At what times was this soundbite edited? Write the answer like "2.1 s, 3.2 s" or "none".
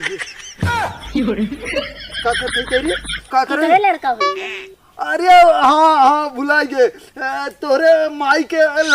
3.1 s